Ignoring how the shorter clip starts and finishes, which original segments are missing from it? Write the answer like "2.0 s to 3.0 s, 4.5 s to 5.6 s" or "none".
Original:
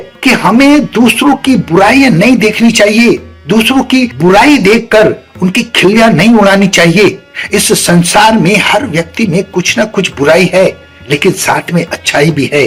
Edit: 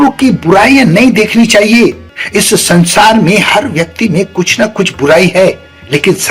3.3 s to 7.3 s